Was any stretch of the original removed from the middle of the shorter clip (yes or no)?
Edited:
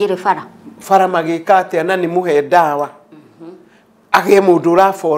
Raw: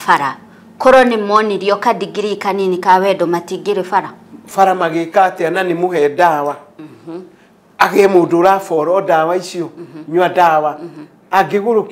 no